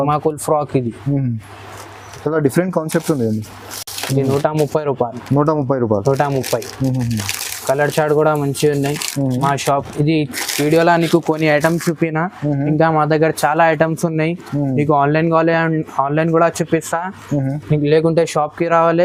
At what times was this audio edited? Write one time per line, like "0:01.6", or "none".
none